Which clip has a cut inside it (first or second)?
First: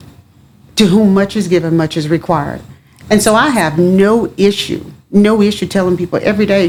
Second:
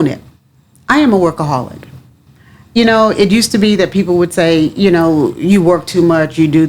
second